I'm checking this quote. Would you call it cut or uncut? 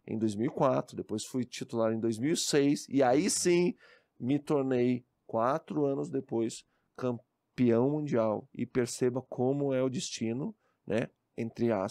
uncut